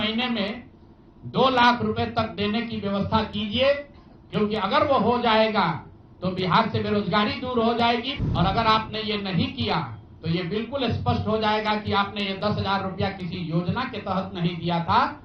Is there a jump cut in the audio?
yes; 1 cut; at 8.1 s

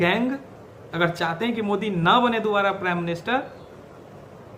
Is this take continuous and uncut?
yes; 0 cuts

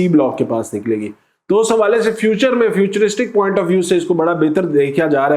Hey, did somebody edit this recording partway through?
no; 0 cuts

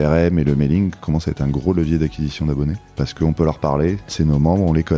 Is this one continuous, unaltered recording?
no; 2 cuts; at 2.9 s, 4.1 s

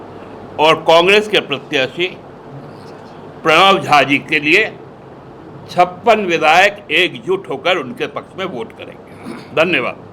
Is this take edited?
no; 0 cuts

